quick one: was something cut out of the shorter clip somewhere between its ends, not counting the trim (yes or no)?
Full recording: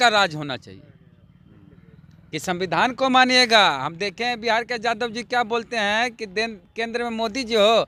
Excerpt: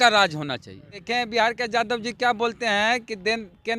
yes